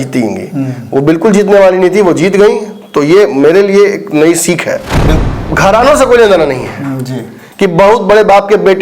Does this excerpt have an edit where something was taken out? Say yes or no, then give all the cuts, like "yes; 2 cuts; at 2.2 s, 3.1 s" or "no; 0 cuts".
yes; 1 cut; at 5.2 s